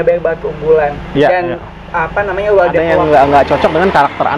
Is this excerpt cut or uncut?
cut